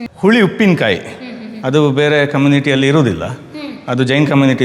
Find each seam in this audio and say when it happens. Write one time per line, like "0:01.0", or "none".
none